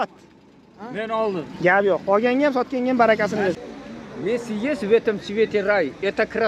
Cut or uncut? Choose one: cut